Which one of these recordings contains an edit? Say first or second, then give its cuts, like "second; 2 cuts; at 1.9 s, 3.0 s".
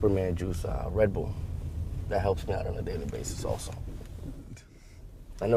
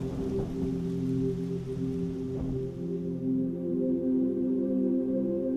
second; 1 cut; at 1.2 s